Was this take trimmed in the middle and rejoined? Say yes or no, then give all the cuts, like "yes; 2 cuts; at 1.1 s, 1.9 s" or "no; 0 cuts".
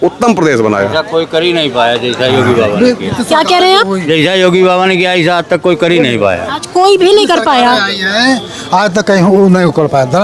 no; 0 cuts